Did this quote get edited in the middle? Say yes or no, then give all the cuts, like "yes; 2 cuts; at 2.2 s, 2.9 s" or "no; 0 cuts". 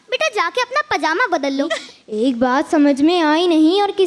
yes; 1 cut; at 1.8 s